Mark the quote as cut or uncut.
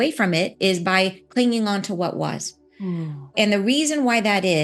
cut